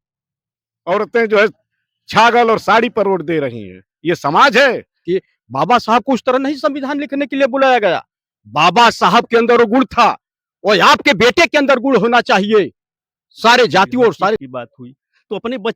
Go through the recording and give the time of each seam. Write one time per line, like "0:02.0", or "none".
0:05.0
0:14.5